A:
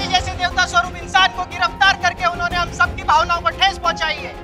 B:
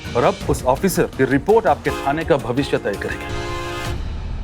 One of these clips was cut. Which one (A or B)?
B